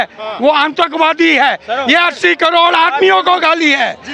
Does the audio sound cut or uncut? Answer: uncut